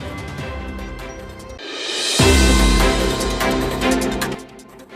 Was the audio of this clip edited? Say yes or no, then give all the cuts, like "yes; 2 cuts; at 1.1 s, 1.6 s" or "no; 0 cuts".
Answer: yes; 2 cuts; at 1.6 s, 4.0 s